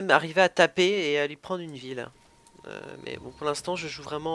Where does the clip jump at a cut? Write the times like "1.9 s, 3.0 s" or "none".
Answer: 2.1 s